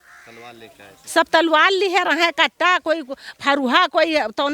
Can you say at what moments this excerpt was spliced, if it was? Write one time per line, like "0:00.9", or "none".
none